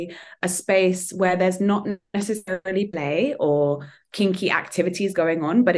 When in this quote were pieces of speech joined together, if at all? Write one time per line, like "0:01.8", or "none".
none